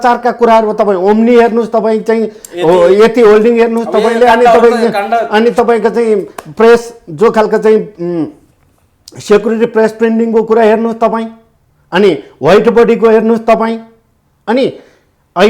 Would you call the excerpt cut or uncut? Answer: uncut